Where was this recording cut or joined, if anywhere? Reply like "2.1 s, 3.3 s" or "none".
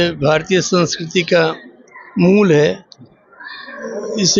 none